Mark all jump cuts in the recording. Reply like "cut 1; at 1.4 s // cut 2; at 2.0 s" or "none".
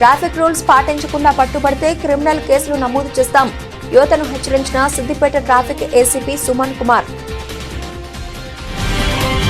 cut 1; at 7.1 s